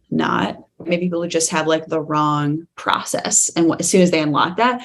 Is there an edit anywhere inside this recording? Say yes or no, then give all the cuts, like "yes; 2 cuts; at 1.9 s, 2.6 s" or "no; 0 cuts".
yes; 1 cut; at 0.9 s